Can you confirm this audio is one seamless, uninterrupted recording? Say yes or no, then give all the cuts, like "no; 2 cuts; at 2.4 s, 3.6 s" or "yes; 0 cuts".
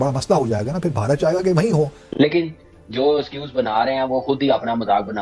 no; 1 cut; at 2.1 s